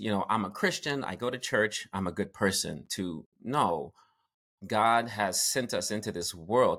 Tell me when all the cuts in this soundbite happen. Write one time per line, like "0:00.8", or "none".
none